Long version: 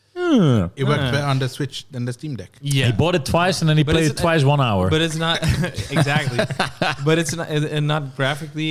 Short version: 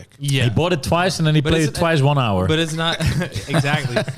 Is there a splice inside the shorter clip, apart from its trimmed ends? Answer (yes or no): no